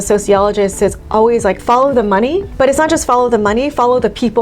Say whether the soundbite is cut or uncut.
cut